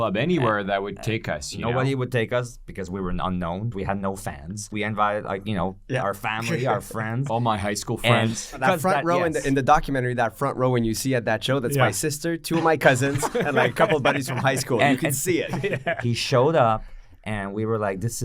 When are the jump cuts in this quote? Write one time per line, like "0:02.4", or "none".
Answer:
0:03.7
0:04.7
0:08.6
0:15.5